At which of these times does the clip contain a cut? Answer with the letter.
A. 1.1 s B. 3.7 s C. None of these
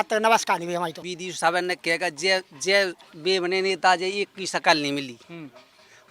A